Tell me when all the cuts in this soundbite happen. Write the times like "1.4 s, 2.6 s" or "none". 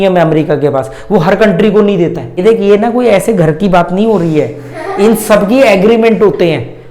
2.3 s